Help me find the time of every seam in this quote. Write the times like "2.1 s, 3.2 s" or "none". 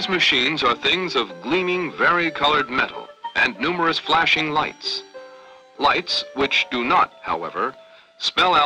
none